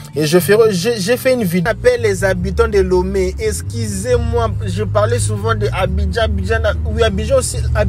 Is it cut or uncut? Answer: cut